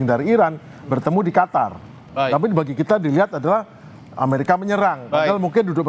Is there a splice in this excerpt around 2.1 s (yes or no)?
yes